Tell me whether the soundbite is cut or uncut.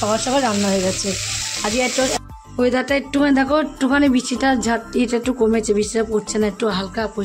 cut